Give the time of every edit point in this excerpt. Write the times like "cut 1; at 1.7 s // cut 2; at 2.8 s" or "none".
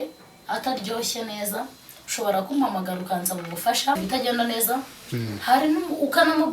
cut 1; at 4.0 s